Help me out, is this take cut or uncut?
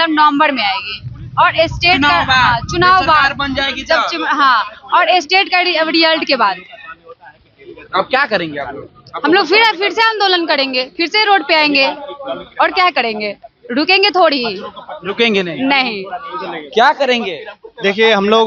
uncut